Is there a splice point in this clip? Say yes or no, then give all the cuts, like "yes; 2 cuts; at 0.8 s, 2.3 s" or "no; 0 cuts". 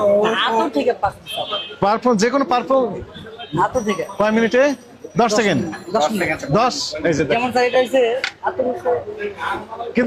no; 0 cuts